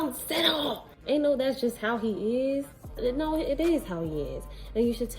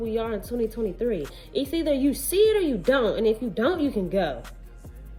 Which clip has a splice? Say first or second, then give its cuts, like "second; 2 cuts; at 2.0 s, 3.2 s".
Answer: first; 2 cuts; at 0.9 s, 2.9 s